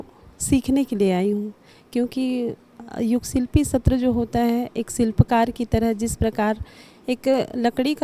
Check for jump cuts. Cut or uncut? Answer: uncut